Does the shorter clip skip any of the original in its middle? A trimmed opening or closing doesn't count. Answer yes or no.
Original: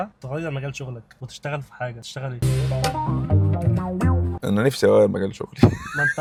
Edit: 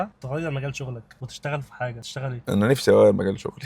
yes